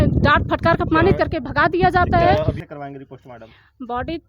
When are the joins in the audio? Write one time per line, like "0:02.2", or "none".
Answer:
0:02.6